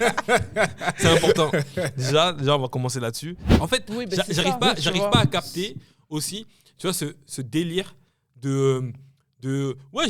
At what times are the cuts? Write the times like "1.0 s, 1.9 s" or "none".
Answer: 3.5 s